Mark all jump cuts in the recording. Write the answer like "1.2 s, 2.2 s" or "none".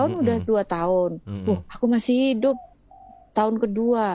none